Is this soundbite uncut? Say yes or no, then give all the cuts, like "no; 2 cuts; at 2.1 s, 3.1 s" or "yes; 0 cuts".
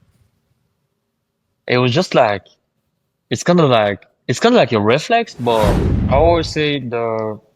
no; 1 cut; at 5.9 s